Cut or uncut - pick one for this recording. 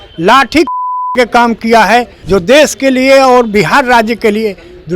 cut